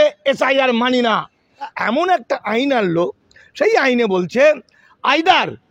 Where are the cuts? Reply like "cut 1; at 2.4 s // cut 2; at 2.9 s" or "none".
cut 1; at 1.7 s